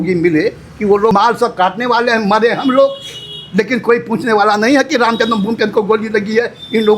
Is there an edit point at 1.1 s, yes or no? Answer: yes